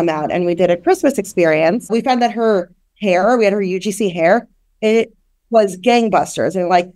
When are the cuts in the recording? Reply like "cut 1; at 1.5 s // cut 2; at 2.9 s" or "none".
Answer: cut 1; at 1.9 s

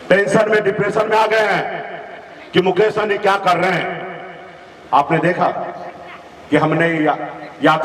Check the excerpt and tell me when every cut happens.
none

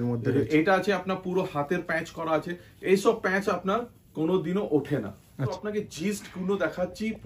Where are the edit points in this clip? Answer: cut 1; at 5.6 s

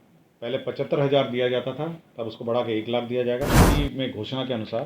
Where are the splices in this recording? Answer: cut 1; at 3.6 s

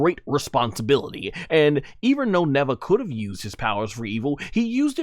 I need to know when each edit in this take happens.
none

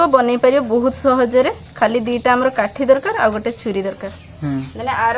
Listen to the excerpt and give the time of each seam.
none

